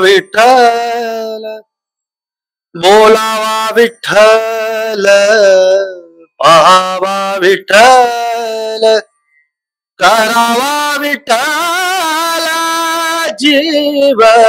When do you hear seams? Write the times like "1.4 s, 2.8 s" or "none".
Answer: none